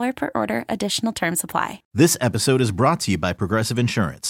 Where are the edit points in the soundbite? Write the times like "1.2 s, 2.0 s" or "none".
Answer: 1.8 s